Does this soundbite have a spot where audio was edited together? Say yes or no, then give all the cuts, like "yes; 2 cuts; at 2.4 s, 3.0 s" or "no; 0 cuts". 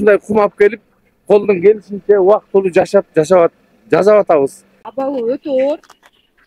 yes; 1 cut; at 4.7 s